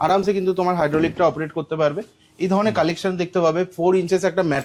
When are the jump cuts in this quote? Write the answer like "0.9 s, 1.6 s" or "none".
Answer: none